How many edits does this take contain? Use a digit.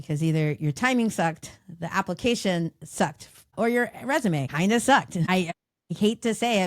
3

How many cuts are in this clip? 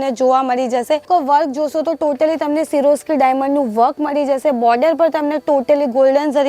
1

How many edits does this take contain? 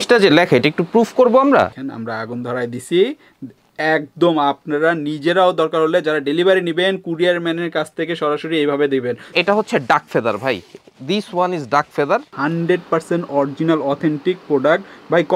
3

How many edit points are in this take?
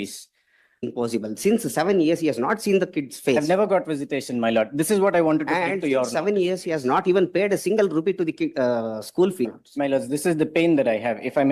2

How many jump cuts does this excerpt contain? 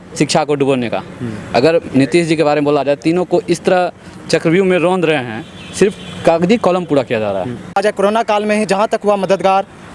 1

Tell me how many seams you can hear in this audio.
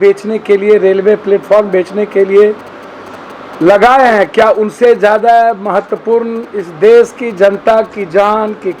0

